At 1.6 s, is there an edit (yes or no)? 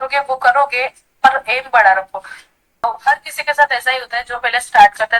no